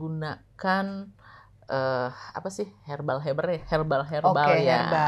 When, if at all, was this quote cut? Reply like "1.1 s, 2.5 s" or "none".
none

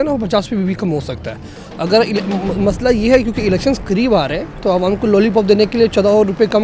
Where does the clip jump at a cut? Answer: none

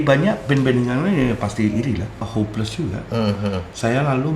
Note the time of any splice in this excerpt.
2.2 s

